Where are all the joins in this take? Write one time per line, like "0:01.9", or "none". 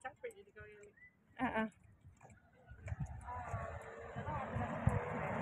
none